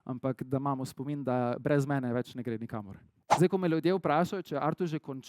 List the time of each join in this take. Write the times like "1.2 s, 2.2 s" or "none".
3.0 s